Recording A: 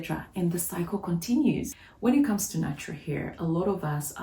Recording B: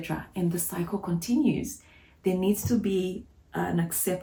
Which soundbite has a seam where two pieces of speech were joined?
A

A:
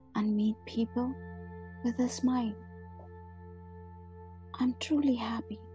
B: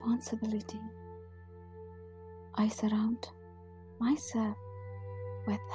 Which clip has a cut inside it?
B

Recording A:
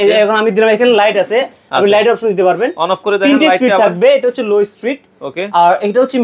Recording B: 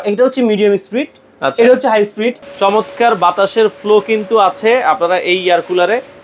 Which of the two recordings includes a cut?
B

